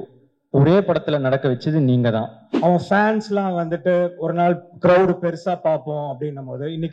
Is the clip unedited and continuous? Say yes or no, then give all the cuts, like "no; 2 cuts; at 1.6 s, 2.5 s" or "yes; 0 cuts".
no; 1 cut; at 2.5 s